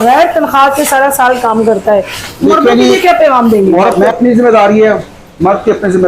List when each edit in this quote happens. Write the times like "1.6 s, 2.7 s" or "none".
3.9 s